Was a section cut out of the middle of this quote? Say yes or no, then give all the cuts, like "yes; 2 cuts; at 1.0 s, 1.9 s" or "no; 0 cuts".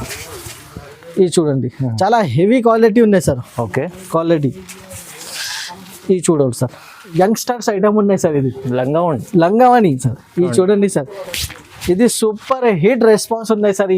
yes; 1 cut; at 7.1 s